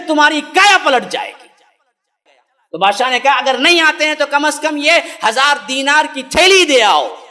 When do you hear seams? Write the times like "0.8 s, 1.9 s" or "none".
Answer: 2.1 s